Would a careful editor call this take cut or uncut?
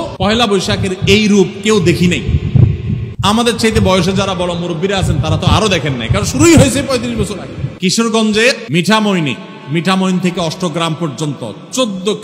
cut